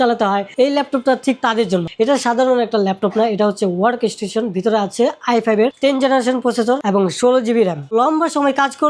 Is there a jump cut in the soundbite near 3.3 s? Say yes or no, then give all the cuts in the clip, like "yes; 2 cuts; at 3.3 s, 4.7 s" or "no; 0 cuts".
no; 2 cuts; at 1.9 s, 7.9 s